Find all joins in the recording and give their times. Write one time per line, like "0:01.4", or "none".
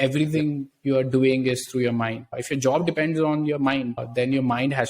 0:02.4